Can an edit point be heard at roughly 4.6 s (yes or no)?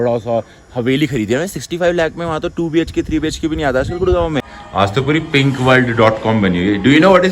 yes